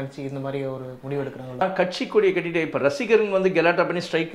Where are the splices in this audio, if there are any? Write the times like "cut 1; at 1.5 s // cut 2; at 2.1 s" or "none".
cut 1; at 1.6 s